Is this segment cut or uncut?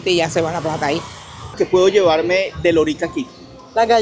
cut